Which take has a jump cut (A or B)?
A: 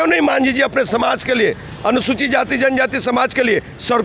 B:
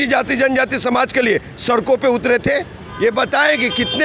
B